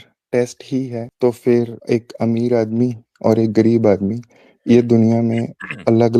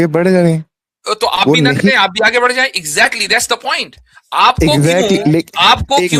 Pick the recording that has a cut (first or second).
first